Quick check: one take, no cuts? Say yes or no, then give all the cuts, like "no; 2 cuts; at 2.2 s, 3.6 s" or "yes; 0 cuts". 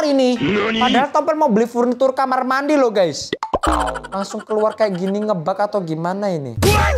yes; 0 cuts